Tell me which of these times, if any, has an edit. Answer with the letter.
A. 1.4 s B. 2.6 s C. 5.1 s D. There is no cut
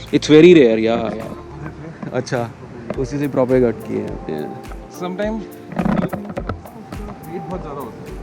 D